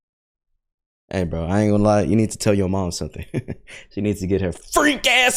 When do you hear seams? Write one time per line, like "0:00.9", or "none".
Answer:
none